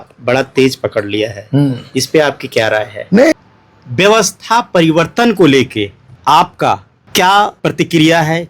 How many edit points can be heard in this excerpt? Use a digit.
4